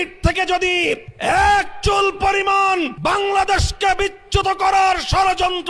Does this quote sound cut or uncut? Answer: cut